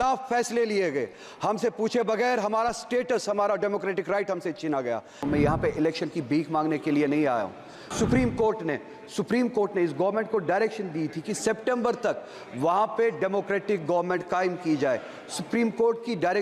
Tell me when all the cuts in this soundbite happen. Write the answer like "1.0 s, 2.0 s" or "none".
5.2 s, 7.9 s